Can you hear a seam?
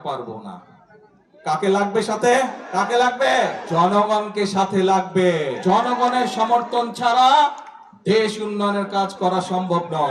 yes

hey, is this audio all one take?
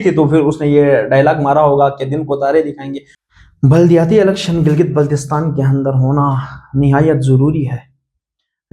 no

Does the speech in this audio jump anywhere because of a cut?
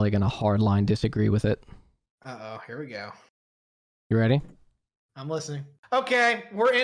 yes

